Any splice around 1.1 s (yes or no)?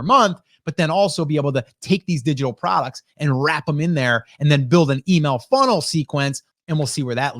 no